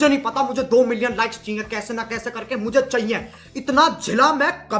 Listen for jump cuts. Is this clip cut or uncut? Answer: uncut